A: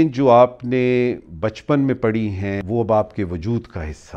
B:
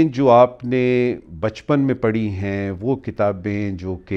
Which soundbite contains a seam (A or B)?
A